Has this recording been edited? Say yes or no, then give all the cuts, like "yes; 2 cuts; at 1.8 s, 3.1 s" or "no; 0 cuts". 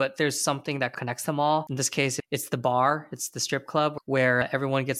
yes; 1 cut; at 1.8 s